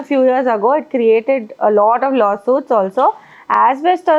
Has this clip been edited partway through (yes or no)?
no